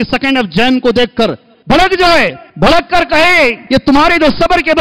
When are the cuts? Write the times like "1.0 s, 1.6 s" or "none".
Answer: 1.5 s, 2.4 s, 3.6 s